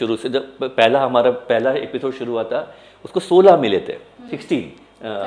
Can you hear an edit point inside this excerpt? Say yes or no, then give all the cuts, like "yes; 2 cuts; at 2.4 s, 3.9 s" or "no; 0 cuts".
no; 0 cuts